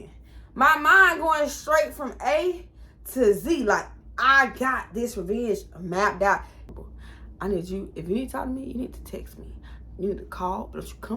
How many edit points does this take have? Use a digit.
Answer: 1